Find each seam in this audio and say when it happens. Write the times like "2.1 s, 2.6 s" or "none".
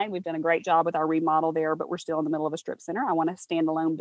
none

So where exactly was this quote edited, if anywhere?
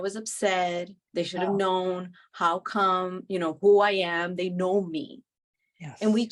1.0 s

